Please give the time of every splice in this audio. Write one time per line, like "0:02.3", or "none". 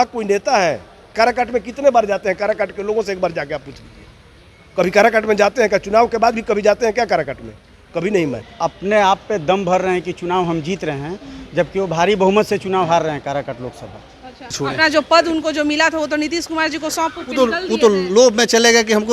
0:01.1
0:08.5
0:14.6